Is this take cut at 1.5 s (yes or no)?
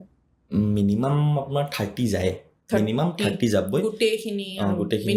no